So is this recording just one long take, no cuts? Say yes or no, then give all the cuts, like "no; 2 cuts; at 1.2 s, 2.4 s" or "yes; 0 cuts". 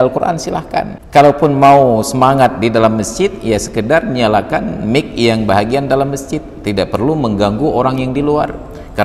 no; 1 cut; at 1.0 s